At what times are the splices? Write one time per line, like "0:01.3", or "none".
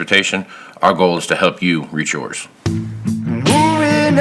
0:02.4